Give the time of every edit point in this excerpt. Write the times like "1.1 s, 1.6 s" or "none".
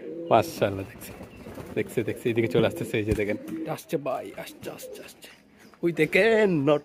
3.7 s